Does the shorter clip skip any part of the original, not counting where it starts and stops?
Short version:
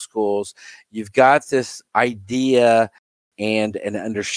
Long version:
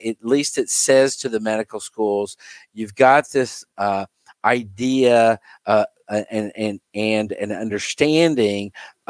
yes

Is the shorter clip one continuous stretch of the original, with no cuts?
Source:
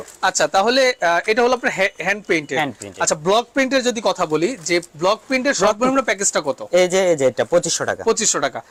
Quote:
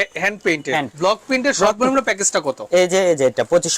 no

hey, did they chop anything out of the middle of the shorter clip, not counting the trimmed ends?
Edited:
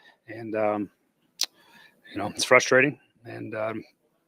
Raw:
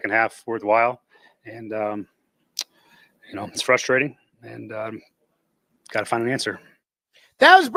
no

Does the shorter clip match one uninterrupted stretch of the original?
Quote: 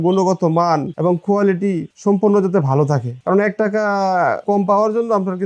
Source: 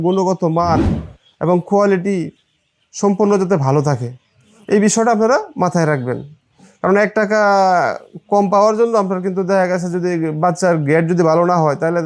no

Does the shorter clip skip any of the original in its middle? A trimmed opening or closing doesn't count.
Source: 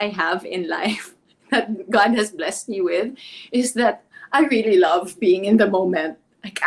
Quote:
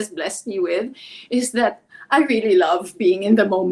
no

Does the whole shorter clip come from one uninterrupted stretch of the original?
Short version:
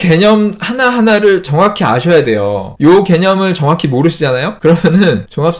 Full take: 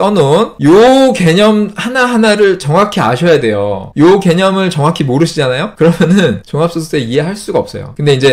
yes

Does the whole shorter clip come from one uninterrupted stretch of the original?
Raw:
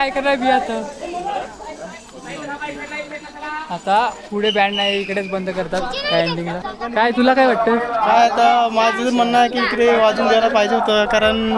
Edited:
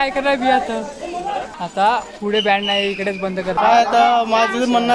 no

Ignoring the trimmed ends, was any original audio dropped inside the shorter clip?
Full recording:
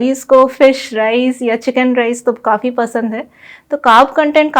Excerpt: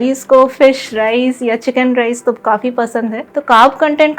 yes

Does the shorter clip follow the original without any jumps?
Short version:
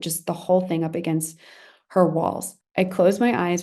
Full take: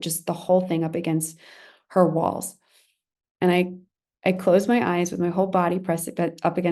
no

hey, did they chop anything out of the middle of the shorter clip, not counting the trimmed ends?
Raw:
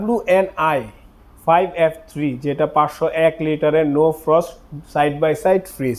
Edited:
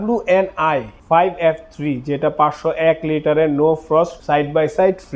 yes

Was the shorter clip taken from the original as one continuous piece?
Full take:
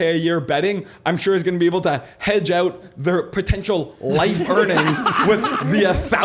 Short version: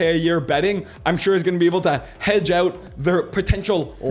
yes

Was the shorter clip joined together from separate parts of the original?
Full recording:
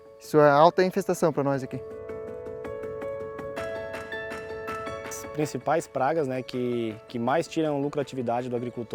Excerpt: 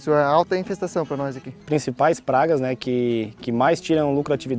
yes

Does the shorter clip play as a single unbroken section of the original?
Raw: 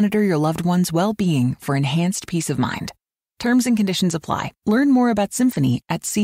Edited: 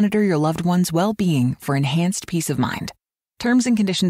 yes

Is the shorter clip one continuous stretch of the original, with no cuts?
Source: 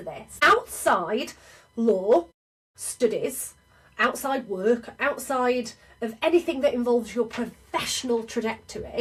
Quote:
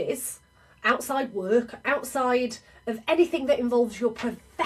yes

